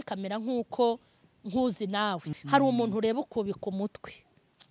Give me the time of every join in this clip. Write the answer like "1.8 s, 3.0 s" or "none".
2.3 s